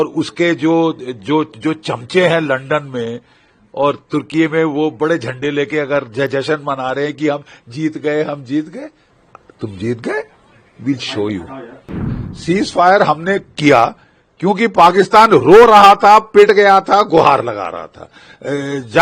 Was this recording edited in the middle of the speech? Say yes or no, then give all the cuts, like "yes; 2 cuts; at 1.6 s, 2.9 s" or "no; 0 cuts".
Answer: yes; 1 cut; at 12.1 s